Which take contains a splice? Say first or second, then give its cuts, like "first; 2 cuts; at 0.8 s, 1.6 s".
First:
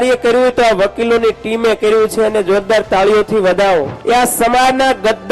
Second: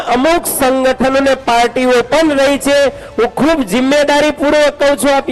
first; 1 cut; at 3.9 s